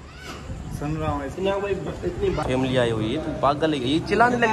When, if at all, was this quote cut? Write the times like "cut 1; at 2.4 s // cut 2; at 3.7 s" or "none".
cut 1; at 2.4 s